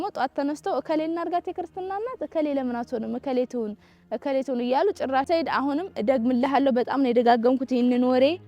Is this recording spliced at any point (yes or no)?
yes